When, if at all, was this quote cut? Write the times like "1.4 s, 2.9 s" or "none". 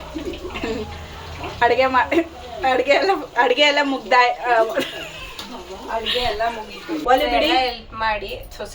7.0 s